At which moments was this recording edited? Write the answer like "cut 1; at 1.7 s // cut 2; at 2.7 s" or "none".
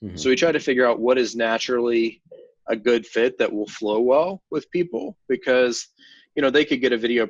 none